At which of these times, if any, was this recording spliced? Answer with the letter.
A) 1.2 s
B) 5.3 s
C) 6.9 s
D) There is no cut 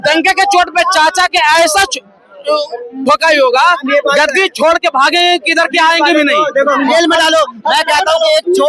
C